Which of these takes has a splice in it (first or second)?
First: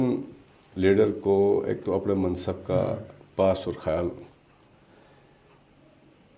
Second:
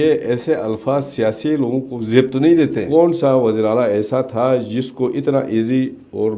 second